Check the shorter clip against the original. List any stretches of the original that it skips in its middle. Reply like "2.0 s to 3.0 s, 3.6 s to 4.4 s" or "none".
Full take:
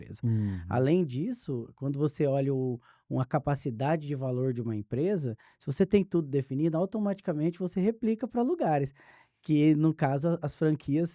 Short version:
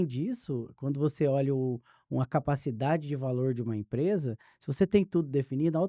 none